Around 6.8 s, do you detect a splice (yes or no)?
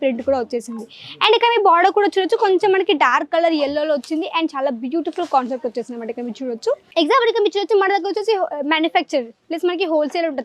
yes